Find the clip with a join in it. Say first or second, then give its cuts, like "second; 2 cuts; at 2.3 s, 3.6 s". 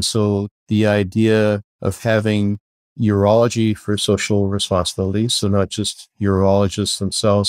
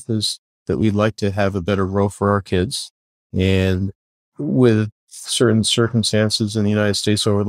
first; 1 cut; at 1.7 s